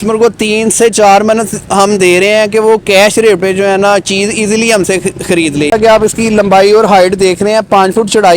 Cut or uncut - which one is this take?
cut